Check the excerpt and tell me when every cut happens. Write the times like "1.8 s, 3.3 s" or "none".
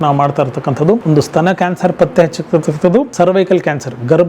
1.0 s, 3.1 s